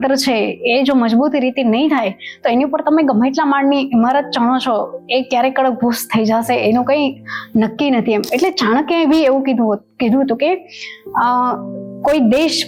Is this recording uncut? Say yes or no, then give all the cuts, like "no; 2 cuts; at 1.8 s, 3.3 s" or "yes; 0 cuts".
yes; 0 cuts